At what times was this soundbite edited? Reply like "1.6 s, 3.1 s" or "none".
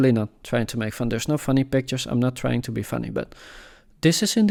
none

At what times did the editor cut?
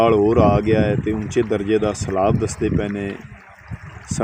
none

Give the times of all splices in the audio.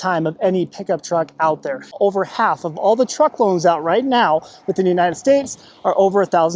2.0 s

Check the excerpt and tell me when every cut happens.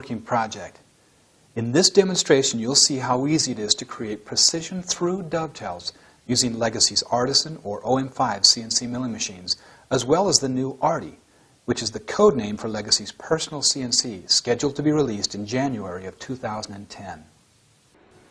none

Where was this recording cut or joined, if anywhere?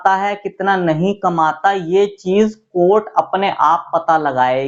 none

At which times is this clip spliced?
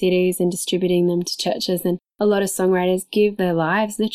2.1 s

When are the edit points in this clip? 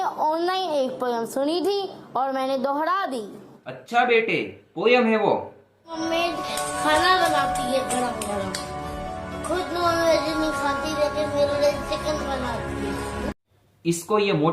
none

